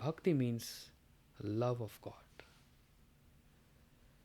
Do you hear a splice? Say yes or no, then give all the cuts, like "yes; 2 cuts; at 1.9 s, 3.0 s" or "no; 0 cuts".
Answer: no; 0 cuts